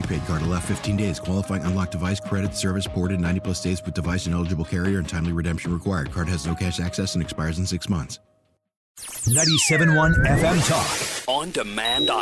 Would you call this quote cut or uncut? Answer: cut